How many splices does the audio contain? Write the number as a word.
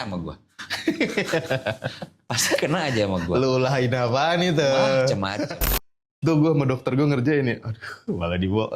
one